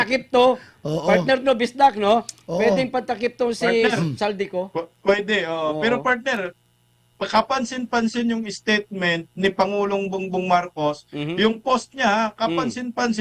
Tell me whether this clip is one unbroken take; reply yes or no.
yes